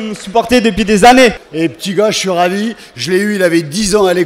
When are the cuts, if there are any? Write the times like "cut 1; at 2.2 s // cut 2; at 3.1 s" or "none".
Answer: cut 1; at 1.5 s